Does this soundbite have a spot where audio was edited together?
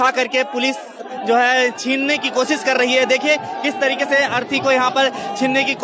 no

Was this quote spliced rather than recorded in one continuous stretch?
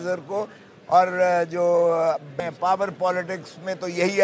yes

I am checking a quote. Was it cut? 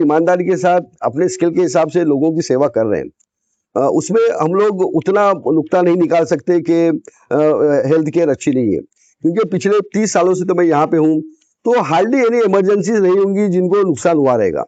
no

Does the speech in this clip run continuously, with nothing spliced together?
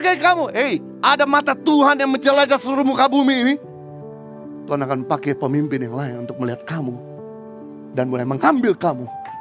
yes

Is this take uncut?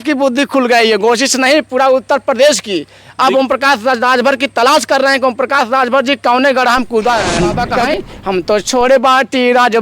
no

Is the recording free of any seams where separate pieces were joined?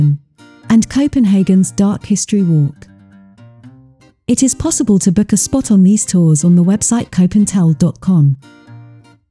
no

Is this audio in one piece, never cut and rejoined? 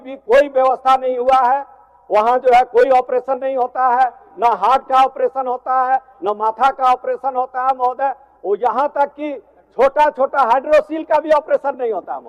yes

